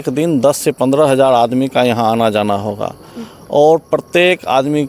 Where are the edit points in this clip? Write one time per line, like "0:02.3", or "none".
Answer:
none